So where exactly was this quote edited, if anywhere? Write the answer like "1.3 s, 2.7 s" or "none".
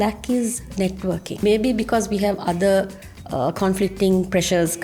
1.4 s